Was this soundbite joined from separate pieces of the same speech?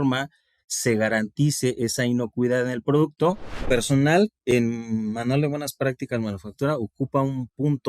yes; 1 cut; at 3.6 s

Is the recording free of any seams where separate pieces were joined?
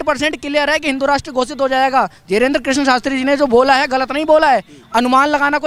yes; 0 cuts

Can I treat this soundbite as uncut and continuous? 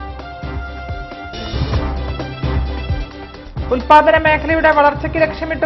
no; 2 cuts; at 1.2 s, 2.7 s

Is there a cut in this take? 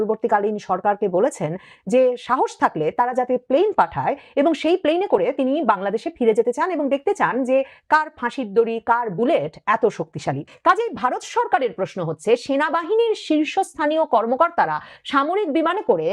yes; 1 cut; at 10.5 s

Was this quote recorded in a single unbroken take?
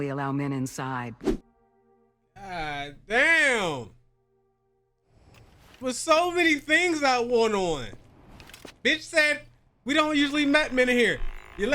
no; 1 cut; at 1.4 s

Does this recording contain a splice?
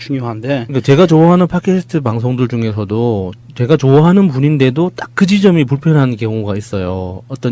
yes; 1 cut; at 4.6 s

